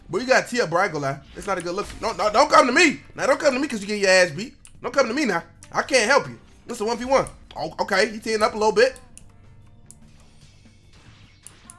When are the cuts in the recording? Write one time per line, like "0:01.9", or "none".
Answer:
none